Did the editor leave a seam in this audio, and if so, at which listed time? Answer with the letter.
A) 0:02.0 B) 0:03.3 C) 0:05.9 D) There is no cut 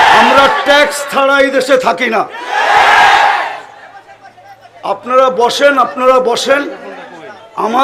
D